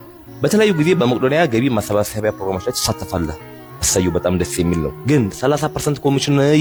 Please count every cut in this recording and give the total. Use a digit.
0